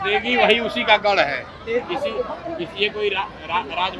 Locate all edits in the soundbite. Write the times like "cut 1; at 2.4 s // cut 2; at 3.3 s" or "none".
none